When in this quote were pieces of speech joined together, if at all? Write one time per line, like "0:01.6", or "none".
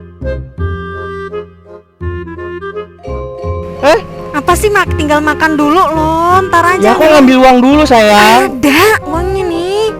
0:01.0